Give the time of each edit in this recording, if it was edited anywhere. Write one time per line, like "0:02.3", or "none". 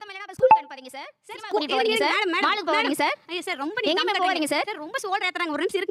none